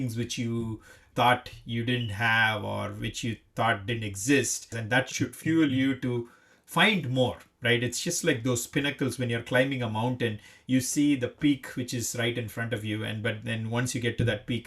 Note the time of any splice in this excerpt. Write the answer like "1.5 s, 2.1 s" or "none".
1.1 s, 4.8 s